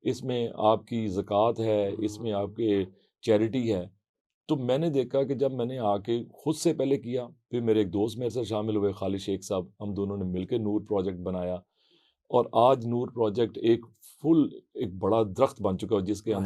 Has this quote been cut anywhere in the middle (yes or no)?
no